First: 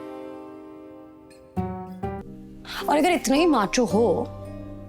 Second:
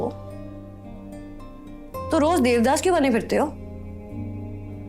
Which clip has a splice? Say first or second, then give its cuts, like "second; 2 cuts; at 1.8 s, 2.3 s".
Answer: first; 1 cut; at 2.2 s